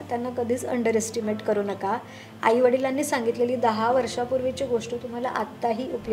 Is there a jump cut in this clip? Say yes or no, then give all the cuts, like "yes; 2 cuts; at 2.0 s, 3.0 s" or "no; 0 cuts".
no; 0 cuts